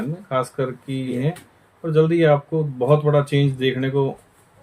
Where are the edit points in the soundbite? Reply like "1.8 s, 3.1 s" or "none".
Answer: 1.1 s